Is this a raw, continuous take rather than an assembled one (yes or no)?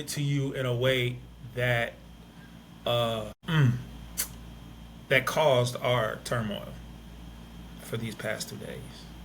yes